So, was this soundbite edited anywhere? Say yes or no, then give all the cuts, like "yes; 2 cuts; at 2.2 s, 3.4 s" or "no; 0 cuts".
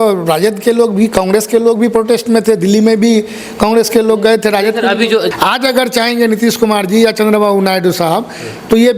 yes; 1 cut; at 5.3 s